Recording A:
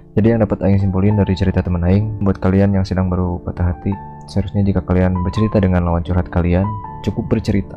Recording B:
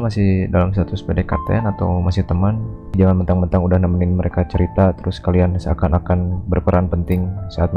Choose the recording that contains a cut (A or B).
A